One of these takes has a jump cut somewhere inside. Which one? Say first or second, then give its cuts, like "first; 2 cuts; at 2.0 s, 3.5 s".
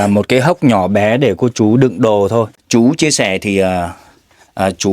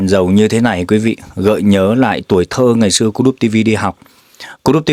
first; 1 cut; at 2.6 s